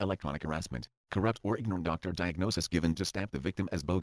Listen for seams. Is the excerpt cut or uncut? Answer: cut